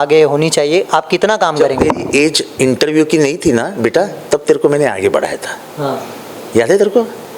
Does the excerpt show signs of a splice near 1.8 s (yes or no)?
no